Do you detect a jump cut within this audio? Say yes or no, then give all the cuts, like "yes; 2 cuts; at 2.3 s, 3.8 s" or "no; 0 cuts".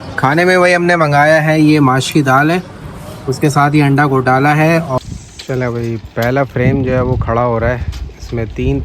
yes; 1 cut; at 5.0 s